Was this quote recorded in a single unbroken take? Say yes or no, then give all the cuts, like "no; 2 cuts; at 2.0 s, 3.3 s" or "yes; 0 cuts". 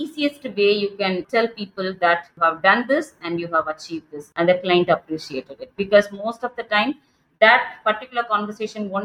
no; 3 cuts; at 1.2 s, 2.3 s, 4.2 s